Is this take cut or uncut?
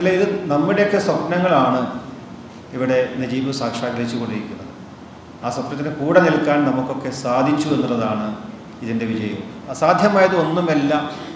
cut